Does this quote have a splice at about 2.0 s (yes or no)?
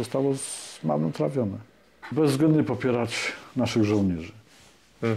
yes